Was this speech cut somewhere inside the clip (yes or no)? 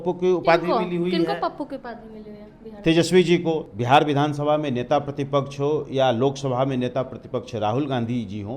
yes